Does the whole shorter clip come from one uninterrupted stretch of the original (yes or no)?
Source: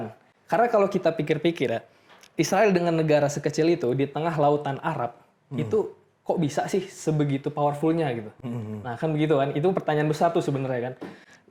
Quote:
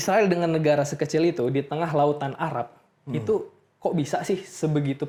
yes